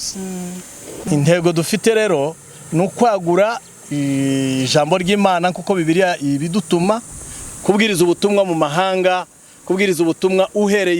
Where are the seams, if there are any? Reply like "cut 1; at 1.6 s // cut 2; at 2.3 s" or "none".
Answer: cut 1; at 1.0 s